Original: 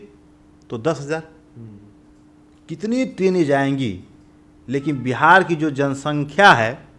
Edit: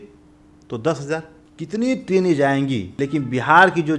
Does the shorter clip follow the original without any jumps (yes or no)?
no